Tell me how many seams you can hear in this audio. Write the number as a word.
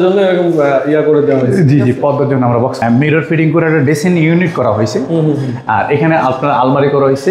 one